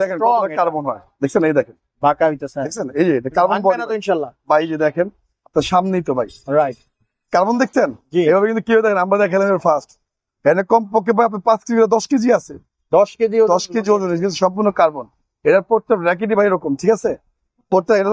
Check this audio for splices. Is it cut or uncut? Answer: uncut